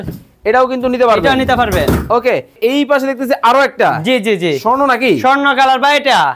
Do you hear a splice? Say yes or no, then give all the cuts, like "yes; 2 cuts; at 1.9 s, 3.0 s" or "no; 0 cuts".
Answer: yes; 1 cut; at 2.6 s